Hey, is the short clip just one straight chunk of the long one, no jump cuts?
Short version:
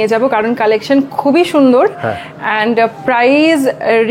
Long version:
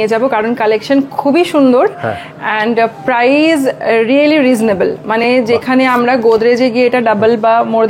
yes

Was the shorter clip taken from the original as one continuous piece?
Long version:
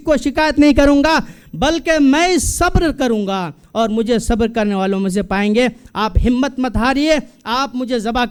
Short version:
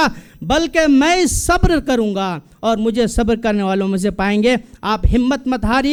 yes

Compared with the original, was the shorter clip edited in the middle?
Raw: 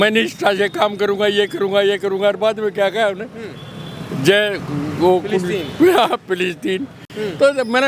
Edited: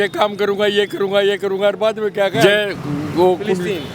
yes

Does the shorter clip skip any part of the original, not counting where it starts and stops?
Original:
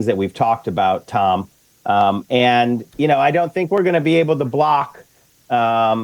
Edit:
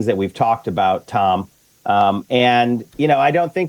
no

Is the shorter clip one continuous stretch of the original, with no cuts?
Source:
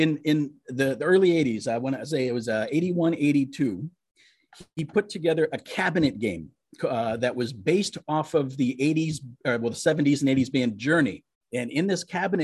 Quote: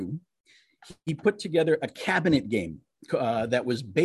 yes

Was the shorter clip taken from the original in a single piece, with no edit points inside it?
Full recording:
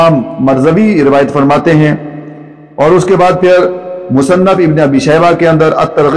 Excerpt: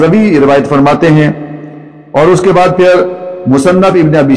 yes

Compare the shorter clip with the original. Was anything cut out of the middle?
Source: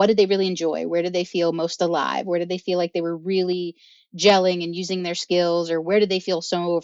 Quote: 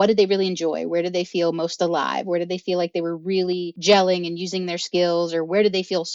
yes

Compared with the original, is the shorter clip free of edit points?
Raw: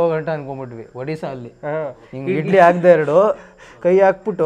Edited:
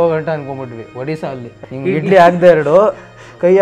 no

